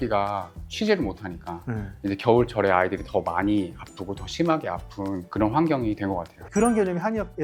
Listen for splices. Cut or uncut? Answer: uncut